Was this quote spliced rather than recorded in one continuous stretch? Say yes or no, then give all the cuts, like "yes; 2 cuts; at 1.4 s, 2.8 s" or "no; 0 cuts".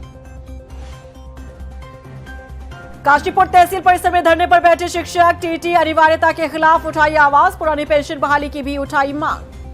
no; 0 cuts